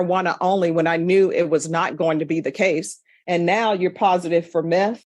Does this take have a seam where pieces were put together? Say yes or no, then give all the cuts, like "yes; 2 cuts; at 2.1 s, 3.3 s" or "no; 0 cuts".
no; 0 cuts